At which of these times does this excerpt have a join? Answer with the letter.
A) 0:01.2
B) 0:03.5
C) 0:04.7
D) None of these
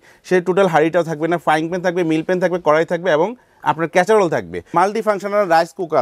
C